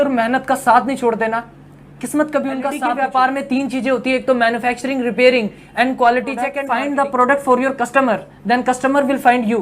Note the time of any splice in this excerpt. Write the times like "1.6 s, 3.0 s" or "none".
2.8 s, 6.6 s